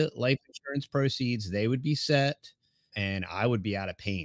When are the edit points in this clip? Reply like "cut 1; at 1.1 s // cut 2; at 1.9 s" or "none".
cut 1; at 2.9 s